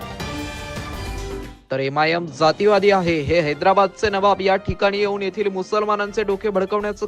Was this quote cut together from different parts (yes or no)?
yes